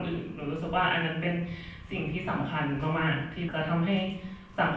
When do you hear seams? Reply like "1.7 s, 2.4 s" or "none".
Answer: 3.5 s